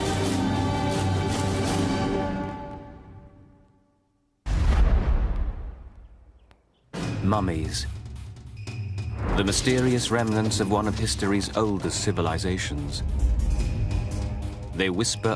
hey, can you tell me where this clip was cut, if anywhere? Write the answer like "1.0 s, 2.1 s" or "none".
13.3 s

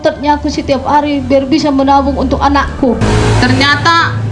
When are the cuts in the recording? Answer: 3.0 s

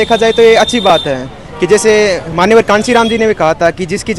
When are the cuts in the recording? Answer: none

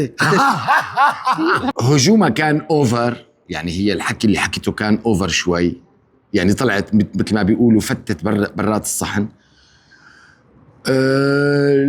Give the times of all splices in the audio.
1.7 s

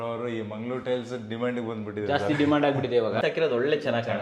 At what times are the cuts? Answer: 3.2 s

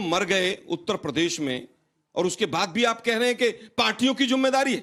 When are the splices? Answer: none

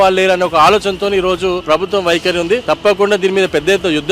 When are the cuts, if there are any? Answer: 1.6 s, 2.6 s

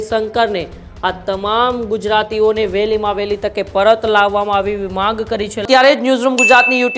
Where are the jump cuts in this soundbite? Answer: 5.6 s

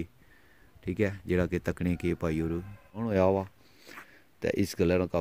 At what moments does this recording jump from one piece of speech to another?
3.1 s

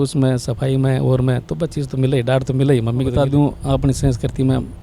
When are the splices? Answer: 3.1 s

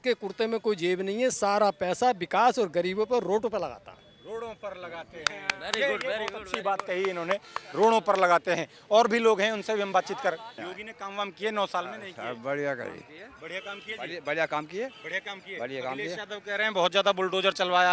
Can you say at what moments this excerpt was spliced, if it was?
none

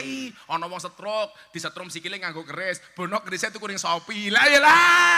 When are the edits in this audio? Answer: none

